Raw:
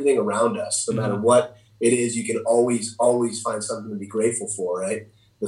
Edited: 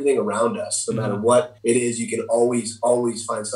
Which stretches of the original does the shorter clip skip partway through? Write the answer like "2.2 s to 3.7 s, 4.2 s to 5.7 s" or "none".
1.5 s to 1.7 s